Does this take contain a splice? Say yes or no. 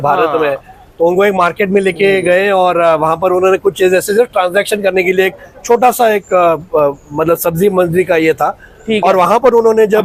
no